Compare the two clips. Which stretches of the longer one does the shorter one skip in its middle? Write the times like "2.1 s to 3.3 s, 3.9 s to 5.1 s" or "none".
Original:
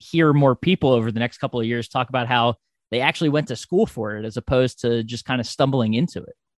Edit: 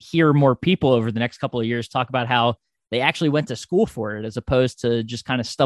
none